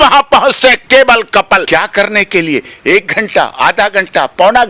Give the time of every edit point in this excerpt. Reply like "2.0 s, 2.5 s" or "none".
0.8 s, 1.7 s